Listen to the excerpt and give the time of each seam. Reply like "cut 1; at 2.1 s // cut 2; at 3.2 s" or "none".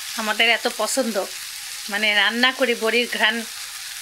none